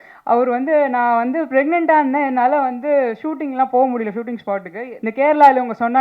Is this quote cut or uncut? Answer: cut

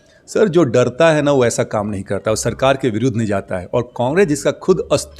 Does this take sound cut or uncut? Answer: uncut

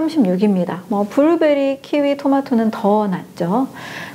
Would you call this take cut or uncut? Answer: uncut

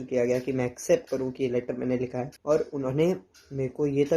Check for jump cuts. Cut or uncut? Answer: cut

